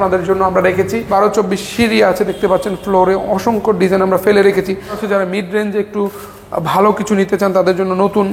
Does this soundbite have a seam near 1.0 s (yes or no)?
yes